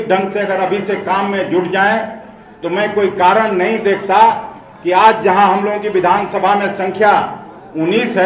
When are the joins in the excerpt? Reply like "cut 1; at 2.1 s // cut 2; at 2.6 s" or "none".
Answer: none

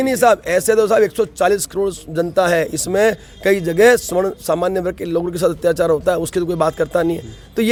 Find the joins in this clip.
none

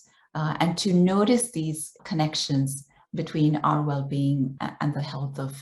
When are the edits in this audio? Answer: cut 1; at 2.0 s // cut 2; at 4.5 s

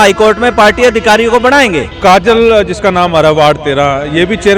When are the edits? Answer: cut 1; at 1.9 s

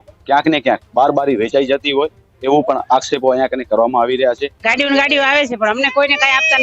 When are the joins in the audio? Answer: cut 1; at 4.5 s

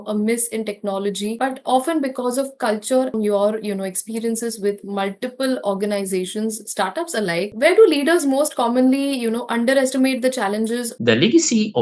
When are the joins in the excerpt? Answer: cut 1; at 3.1 s // cut 2; at 10.9 s

